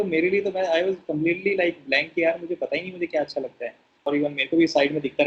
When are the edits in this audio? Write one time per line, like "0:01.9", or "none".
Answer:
0:04.1